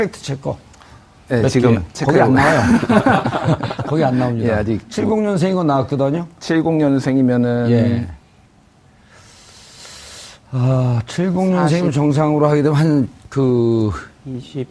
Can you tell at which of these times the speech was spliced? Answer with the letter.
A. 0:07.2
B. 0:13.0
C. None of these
A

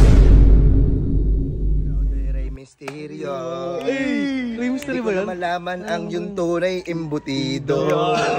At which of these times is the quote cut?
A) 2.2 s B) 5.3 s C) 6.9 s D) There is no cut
D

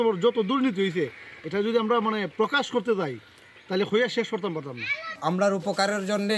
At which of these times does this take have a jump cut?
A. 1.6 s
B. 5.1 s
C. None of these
B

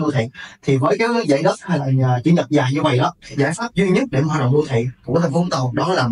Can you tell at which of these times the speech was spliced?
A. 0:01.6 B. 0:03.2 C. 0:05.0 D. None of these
B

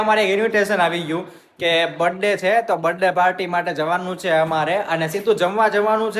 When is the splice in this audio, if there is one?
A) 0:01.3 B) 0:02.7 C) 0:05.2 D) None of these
D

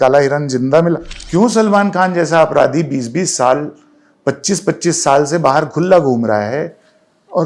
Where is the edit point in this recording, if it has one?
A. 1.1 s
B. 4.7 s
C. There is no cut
A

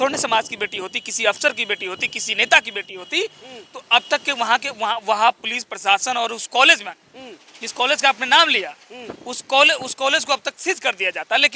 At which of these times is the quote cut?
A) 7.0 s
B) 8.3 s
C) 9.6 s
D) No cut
D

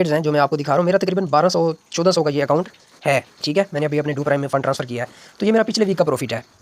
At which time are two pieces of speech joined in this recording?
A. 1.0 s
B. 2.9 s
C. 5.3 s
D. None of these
D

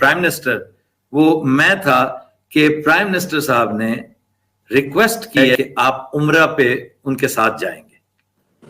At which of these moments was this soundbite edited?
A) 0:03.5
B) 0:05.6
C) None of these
B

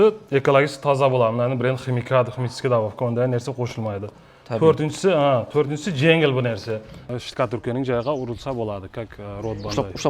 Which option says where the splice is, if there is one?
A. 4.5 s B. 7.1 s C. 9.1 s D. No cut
B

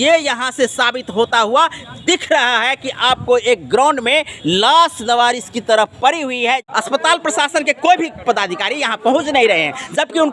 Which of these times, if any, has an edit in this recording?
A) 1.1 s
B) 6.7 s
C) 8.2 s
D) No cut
B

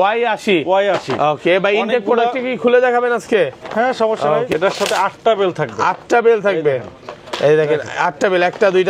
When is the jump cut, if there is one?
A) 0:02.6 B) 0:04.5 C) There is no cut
B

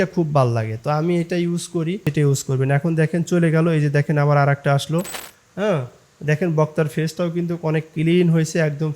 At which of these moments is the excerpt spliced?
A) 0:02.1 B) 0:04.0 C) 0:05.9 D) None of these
A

